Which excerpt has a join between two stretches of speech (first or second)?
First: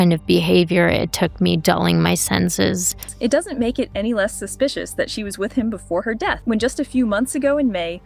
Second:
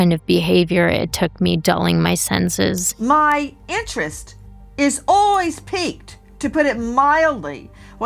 second